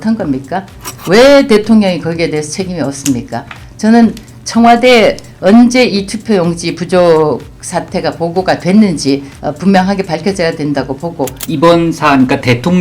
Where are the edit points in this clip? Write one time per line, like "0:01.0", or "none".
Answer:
0:09.4
0:11.4